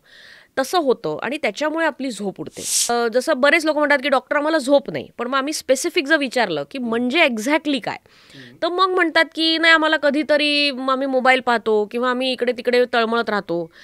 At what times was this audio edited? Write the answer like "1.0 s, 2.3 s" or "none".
2.9 s